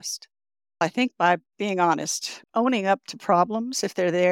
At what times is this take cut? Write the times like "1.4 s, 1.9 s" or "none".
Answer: 0.8 s, 2.4 s